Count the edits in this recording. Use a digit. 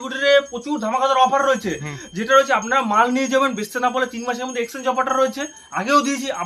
0